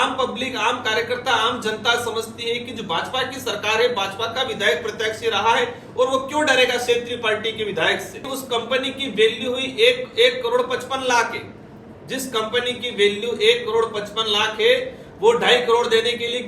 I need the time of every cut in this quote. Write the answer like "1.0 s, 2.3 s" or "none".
8.2 s